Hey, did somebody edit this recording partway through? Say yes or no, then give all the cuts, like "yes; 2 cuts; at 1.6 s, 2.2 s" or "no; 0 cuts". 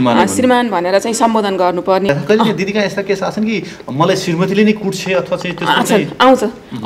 yes; 1 cut; at 2.1 s